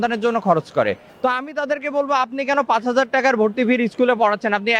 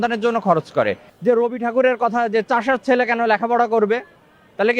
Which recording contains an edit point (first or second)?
second